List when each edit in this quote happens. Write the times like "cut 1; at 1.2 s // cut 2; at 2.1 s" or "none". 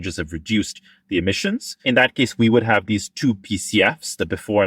cut 1; at 1.7 s